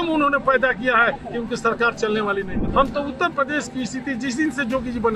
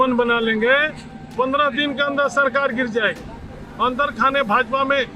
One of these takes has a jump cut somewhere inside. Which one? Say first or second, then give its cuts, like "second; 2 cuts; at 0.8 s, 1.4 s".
first; 1 cut; at 2.5 s